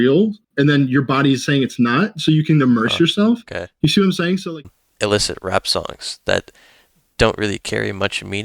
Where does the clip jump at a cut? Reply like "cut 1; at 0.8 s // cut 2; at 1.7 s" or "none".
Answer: cut 1; at 4.5 s